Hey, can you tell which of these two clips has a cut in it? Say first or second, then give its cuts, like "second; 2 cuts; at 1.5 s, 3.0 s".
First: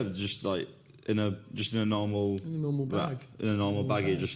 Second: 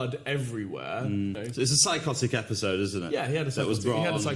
second; 1 cut; at 1.4 s